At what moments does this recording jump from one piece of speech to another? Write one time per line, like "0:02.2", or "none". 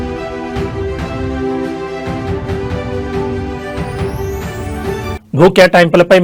none